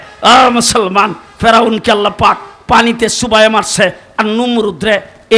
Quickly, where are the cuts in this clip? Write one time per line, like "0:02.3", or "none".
none